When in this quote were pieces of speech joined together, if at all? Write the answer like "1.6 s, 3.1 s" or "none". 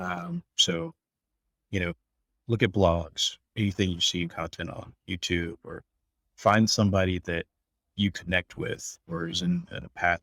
3.4 s